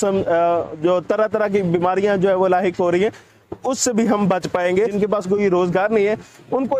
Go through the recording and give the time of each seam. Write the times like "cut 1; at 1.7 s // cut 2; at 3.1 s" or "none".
cut 1; at 4.9 s